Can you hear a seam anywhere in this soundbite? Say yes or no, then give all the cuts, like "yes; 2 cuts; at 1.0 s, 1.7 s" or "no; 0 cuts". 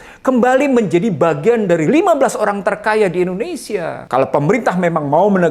yes; 1 cut; at 4.0 s